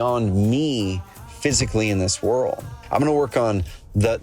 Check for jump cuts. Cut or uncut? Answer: cut